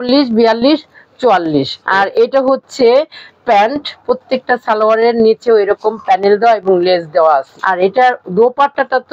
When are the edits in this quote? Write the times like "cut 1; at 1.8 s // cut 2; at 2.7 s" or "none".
cut 1; at 1.8 s // cut 2; at 4.0 s // cut 3; at 7.6 s

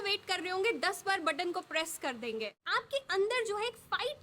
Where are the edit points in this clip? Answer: cut 1; at 2.6 s

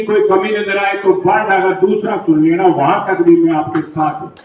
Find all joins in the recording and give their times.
none

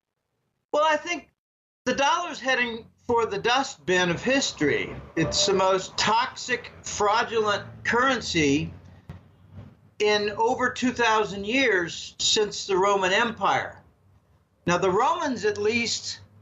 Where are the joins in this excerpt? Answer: none

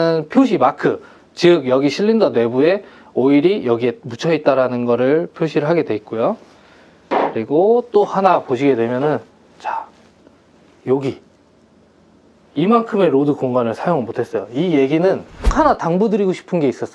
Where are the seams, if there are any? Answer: cut 1; at 15.5 s

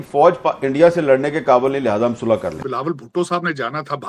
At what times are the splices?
cut 1; at 2.6 s

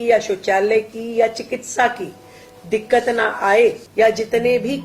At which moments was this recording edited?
cut 1; at 3.8 s

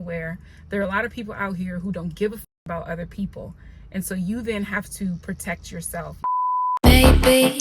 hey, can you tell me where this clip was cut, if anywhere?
cut 1; at 6.2 s

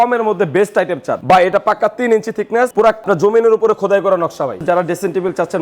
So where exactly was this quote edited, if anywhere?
cut 1; at 1.1 s // cut 2; at 3.0 s // cut 3; at 4.6 s

